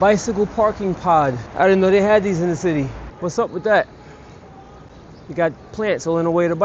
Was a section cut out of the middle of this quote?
yes; 2 cuts; at 1.4 s, 3.0 s

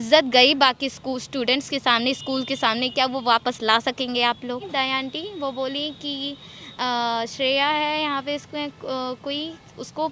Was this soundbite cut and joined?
yes; 1 cut; at 4.7 s

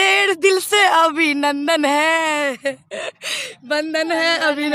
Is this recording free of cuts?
yes; 0 cuts

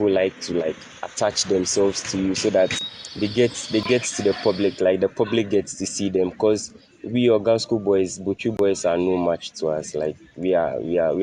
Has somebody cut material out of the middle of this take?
no; 0 cuts

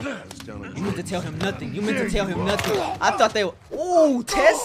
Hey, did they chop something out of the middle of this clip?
no; 0 cuts

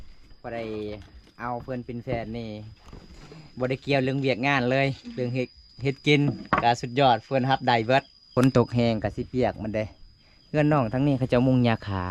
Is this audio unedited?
no; 1 cut; at 8.2 s

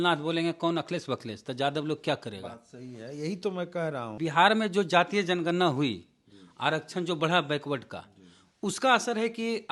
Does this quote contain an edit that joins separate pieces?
yes; 1 cut; at 4.1 s

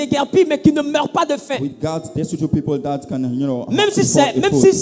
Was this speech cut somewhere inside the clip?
no; 0 cuts

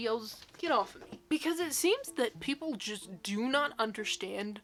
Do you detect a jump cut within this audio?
no; 0 cuts

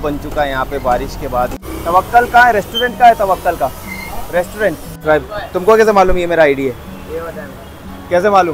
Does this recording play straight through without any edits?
no; 2 cuts; at 1.6 s, 5.2 s

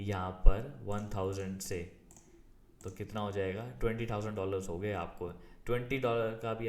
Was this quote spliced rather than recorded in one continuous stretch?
no; 0 cuts

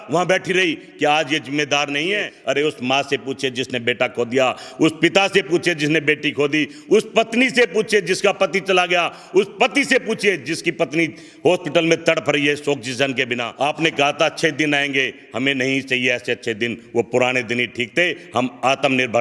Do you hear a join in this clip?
yes; 2 cuts; at 2.4 s, 13.4 s

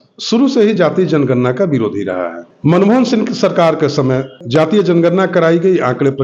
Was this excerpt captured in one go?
no; 2 cuts; at 2.4 s, 4.4 s

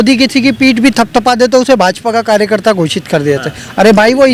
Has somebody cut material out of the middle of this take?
no; 0 cuts

